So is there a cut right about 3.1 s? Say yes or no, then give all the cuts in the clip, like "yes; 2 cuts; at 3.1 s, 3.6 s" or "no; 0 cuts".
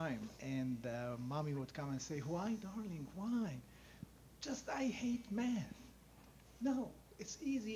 yes; 1 cut; at 3.1 s